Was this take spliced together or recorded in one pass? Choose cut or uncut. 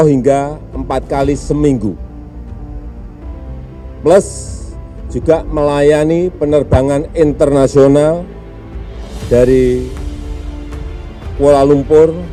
uncut